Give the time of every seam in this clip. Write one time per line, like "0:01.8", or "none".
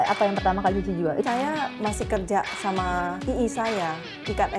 0:01.2
0:03.2